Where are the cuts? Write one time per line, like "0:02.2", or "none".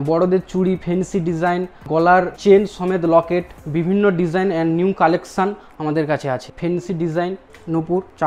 0:01.9
0:03.6
0:06.5